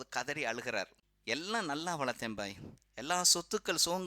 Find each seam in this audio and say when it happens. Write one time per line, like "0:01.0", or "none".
0:01.1